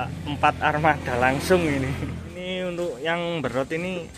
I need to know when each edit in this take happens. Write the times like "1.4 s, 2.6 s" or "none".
2.3 s